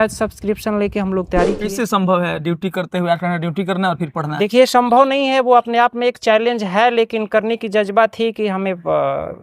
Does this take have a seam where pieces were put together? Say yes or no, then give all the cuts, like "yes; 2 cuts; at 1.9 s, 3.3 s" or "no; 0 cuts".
yes; 1 cut; at 1.7 s